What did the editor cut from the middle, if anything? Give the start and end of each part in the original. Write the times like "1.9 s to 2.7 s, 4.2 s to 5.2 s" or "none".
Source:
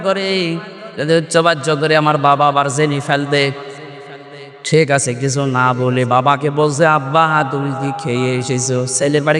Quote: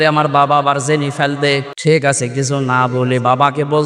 3.6 s to 4.6 s